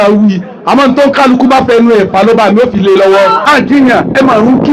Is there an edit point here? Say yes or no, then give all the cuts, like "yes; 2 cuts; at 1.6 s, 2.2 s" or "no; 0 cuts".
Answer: yes; 1 cut; at 3.4 s